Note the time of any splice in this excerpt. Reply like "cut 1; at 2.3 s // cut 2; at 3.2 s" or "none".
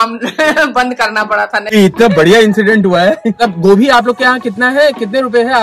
cut 1; at 1.7 s